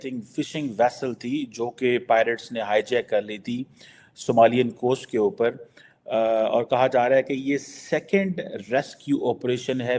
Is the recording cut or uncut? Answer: uncut